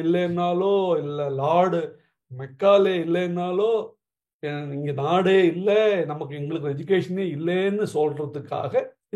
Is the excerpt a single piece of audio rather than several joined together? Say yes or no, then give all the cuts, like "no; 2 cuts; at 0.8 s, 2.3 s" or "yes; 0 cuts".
yes; 0 cuts